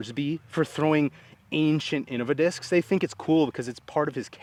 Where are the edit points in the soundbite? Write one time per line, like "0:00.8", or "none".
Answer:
none